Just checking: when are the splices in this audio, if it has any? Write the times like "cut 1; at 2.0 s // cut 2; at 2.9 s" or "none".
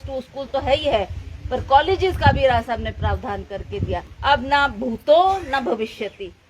cut 1; at 4.1 s